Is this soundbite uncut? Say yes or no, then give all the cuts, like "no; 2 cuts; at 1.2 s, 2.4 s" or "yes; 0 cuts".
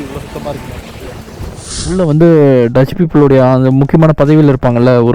no; 1 cut; at 1.9 s